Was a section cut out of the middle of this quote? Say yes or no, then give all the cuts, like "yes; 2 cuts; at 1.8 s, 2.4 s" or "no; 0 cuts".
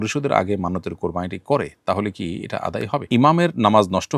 yes; 1 cut; at 3.0 s